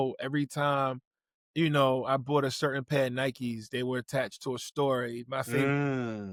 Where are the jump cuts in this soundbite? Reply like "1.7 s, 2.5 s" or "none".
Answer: none